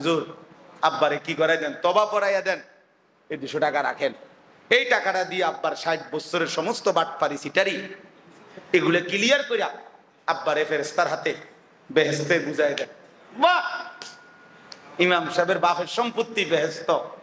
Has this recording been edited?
no; 0 cuts

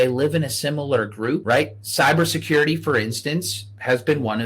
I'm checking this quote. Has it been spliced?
yes; 1 cut; at 1.4 s

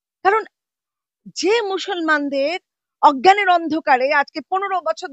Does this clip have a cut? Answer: no; 0 cuts

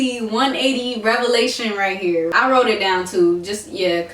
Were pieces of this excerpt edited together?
yes; 1 cut; at 2.3 s

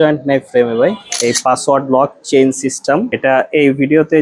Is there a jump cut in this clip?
yes; 2 cuts; at 1.1 s, 3.1 s

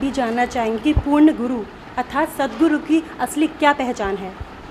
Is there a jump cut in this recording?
no; 0 cuts

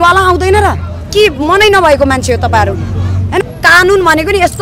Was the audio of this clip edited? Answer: yes; 1 cut; at 3.4 s

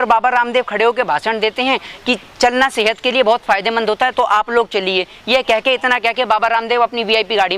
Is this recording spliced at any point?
no; 0 cuts

